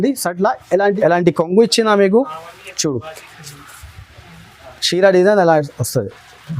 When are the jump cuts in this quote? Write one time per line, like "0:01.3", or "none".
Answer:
0:01.0